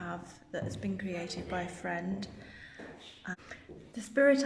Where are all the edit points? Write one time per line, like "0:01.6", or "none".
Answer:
0:03.3